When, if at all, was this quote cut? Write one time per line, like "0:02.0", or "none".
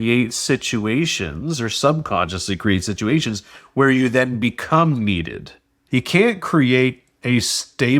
0:05.8